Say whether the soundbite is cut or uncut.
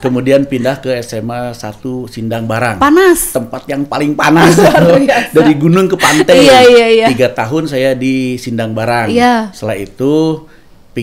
uncut